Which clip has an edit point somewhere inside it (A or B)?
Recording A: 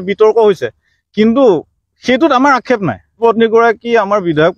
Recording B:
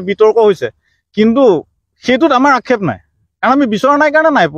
A